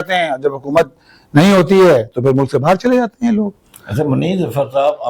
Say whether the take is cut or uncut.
uncut